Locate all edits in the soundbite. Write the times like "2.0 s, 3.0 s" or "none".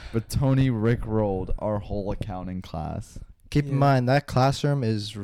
none